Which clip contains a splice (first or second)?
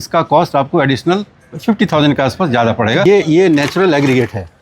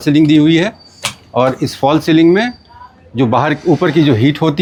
first